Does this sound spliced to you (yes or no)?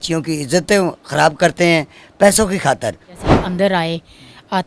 yes